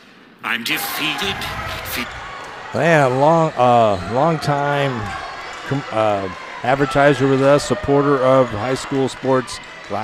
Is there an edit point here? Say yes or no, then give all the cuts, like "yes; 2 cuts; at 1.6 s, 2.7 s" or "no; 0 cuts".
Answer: no; 0 cuts